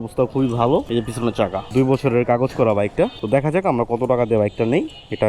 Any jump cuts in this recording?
yes; 1 cut; at 1.6 s

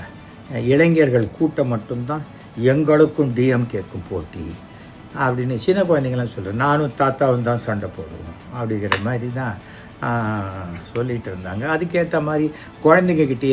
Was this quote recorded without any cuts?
yes; 0 cuts

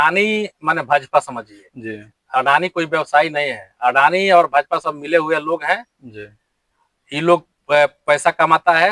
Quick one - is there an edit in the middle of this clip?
no; 0 cuts

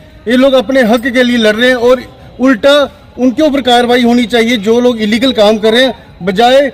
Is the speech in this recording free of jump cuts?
yes; 0 cuts

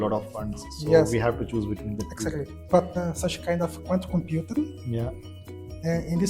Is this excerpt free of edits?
no; 1 cut; at 3.0 s

